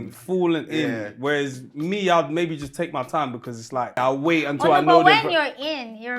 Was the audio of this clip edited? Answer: yes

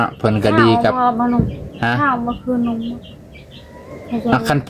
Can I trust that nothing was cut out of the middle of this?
yes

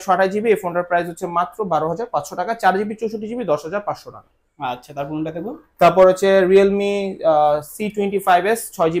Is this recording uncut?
yes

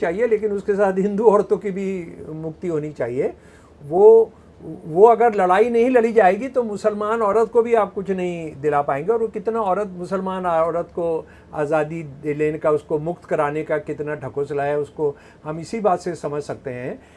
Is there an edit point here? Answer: no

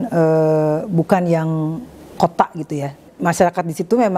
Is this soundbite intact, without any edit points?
no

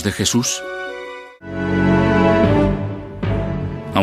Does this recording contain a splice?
yes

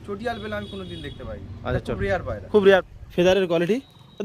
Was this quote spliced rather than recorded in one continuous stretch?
yes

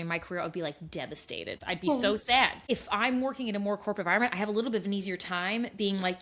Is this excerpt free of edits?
no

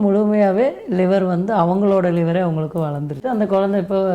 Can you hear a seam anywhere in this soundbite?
yes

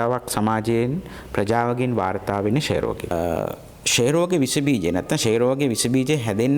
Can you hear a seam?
yes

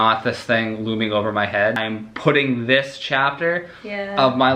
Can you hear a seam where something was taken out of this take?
yes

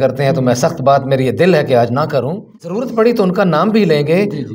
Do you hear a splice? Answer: yes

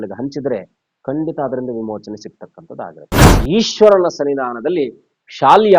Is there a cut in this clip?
yes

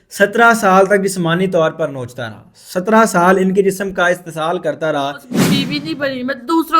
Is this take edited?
yes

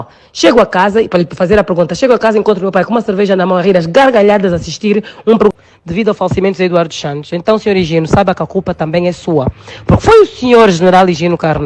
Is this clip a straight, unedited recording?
no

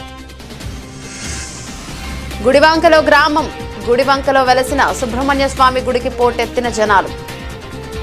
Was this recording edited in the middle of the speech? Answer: yes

